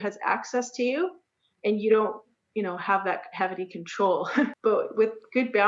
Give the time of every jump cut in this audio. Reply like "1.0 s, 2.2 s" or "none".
4.5 s